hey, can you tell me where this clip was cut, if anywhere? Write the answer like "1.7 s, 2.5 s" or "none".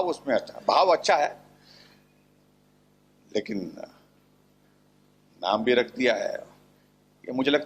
none